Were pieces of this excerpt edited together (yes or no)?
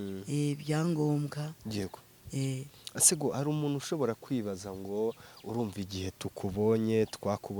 no